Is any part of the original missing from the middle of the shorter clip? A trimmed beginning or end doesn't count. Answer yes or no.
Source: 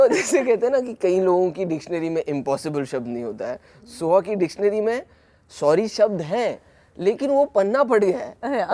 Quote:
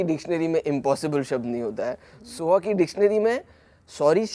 no